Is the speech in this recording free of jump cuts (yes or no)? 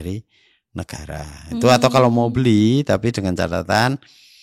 yes